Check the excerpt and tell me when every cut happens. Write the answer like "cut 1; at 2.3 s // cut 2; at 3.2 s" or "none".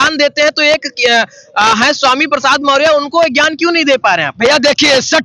none